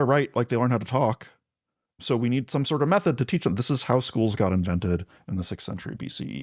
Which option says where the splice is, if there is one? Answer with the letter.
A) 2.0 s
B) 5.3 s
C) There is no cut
A